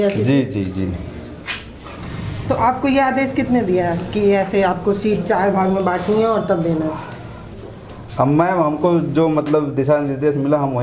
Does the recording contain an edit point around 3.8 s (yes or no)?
no